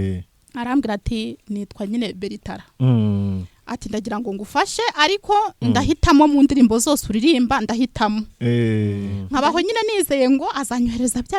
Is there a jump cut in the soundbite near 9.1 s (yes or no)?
yes